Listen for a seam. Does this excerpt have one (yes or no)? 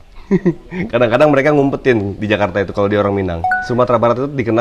yes